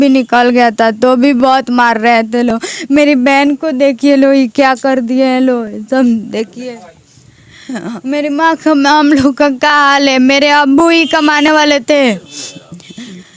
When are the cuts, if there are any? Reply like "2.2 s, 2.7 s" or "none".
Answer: none

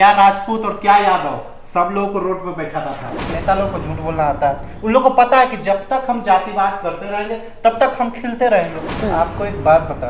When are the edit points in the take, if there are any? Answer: 3.3 s, 9.0 s

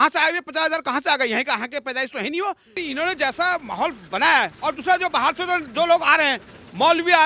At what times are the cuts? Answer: 2.7 s

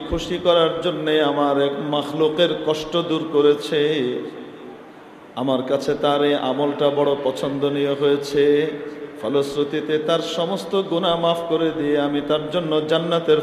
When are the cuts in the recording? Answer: none

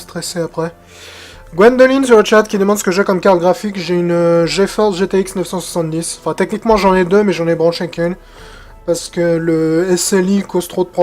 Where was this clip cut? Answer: 7.8 s

